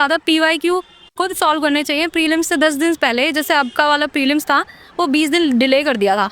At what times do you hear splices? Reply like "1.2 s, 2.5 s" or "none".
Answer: none